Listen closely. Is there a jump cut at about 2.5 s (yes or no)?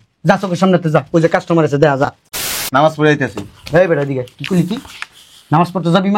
yes